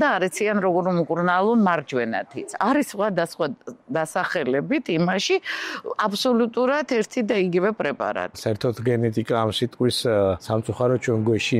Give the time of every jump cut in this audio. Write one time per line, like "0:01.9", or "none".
0:02.5
0:08.4
0:10.4